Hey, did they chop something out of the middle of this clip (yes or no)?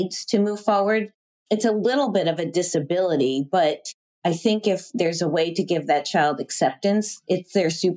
no